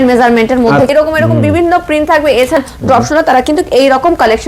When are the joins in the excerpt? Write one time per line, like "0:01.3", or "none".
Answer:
0:00.9
0:02.6